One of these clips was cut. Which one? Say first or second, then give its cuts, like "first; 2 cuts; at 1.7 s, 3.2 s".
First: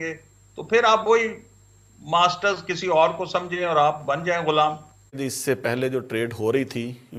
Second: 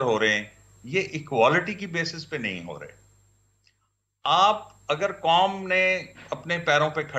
first; 1 cut; at 5.2 s